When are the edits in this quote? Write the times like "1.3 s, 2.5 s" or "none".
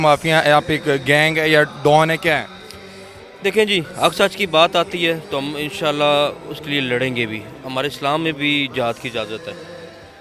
none